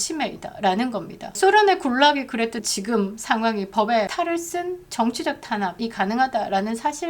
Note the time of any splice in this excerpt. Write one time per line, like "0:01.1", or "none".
0:01.4
0:02.6
0:04.1
0:05.8